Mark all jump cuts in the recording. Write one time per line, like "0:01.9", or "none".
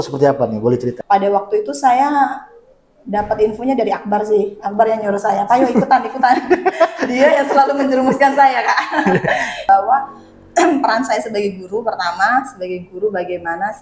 0:01.0
0:09.6